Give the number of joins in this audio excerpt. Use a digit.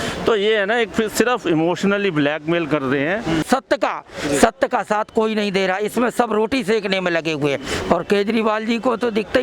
1